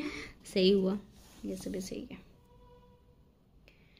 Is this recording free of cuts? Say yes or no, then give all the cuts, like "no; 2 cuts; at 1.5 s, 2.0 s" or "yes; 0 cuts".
yes; 0 cuts